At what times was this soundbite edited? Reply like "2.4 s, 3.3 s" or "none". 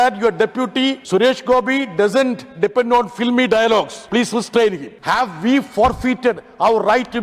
1.0 s, 4.0 s, 4.9 s